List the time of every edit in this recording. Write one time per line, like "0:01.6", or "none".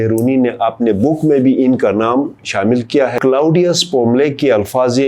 0:03.2